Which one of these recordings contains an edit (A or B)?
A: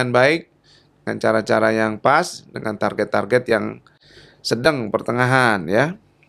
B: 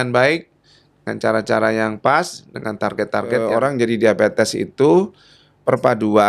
B